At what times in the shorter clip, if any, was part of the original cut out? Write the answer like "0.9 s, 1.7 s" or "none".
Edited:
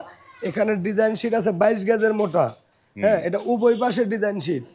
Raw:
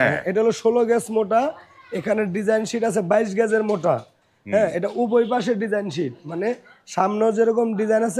none

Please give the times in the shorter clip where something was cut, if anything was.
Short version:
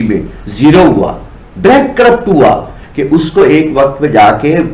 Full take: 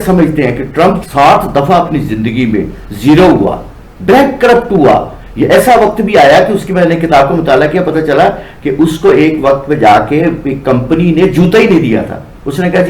2.8 s

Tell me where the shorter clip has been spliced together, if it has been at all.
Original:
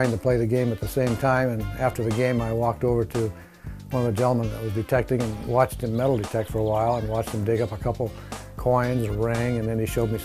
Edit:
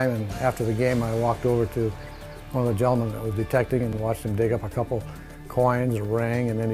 4.0 s

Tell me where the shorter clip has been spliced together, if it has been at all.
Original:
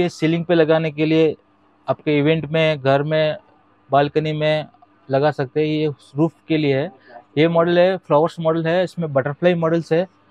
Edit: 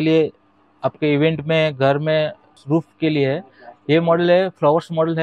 2.5 s

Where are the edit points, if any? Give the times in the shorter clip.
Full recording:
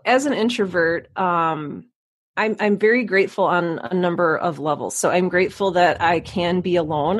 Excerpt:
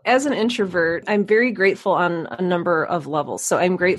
1.0 s

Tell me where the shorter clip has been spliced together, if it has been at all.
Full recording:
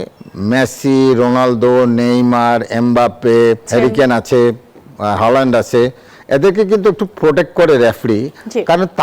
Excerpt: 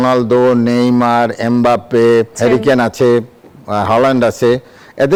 none

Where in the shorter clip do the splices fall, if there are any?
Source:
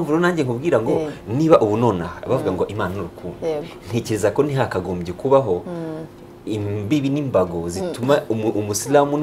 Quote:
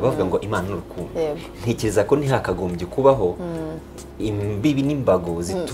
none

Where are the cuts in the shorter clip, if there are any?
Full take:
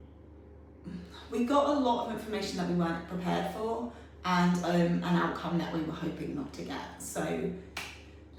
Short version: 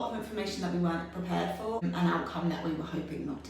1.8 s

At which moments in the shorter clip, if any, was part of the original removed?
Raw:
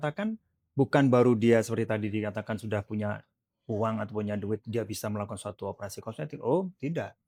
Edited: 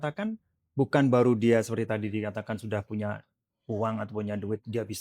none

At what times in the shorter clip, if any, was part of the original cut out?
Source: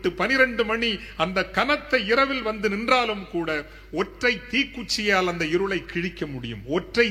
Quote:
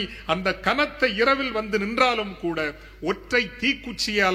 none

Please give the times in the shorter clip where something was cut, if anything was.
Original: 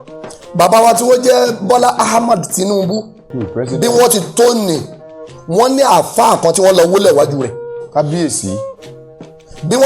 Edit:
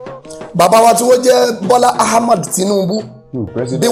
none

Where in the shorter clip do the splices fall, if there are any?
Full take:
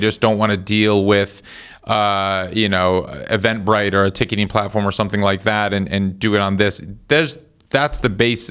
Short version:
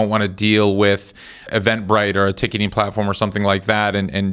1.4 s

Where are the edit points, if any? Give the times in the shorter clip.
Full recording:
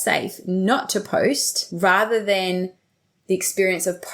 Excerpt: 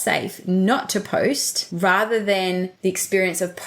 2.7 s

